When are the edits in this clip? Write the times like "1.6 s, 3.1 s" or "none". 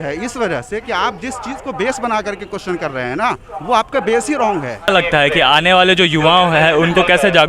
4.9 s